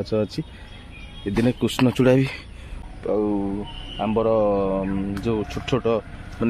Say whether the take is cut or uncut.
cut